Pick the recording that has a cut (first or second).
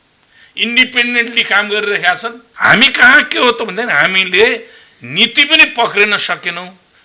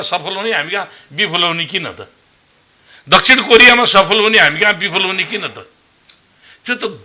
first